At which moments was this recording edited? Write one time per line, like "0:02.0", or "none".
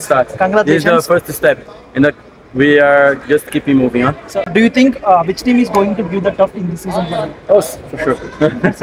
0:04.5